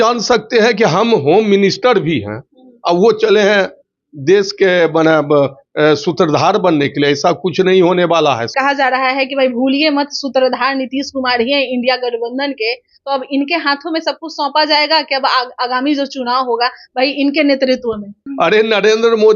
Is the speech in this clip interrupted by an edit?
yes; 2 cuts; at 8.5 s, 18.2 s

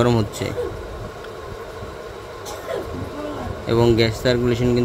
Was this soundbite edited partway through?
no; 0 cuts

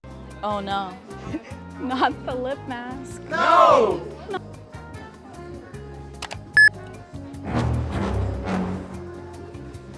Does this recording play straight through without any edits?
no; 1 cut; at 4.3 s

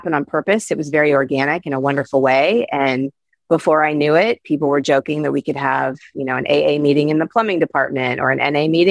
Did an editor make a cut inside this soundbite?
no; 0 cuts

